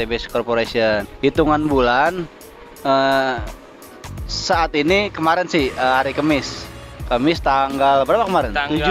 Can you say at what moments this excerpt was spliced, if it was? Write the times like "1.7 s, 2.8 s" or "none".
1.1 s